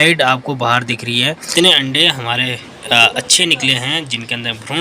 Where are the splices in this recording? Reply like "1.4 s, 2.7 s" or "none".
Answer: 1.4 s